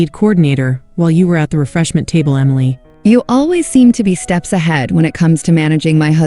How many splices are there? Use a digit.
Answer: 1